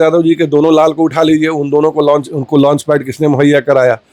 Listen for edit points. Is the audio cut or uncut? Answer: uncut